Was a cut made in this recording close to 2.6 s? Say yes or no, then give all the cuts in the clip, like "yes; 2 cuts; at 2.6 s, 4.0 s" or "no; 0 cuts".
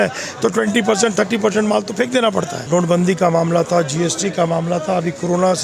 yes; 1 cut; at 2.6 s